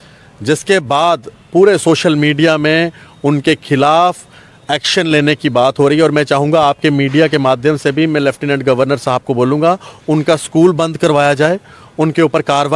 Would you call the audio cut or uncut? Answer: uncut